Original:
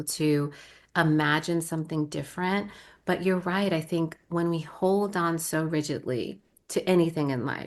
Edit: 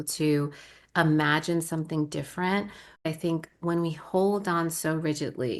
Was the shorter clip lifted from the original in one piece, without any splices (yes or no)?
no